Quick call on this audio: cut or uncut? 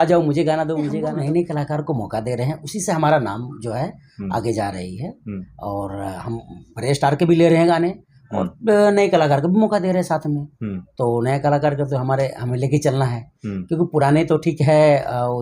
cut